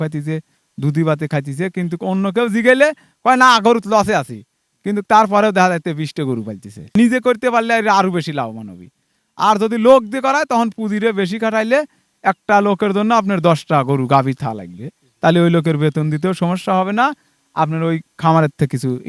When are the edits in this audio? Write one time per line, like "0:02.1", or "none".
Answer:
0:06.9